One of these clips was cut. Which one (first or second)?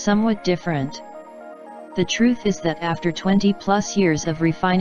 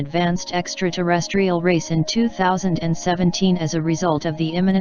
first